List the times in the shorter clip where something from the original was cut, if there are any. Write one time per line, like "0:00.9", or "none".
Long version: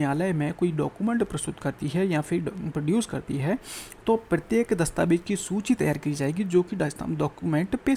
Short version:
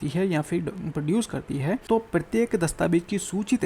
0:01.8